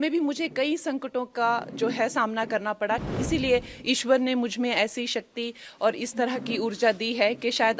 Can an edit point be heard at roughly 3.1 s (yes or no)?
yes